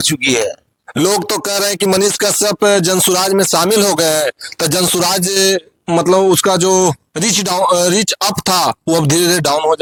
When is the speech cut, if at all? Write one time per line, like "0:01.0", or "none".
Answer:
none